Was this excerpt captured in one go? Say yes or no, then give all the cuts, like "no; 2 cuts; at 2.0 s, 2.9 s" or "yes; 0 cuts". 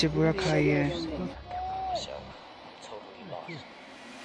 no; 1 cut; at 1.3 s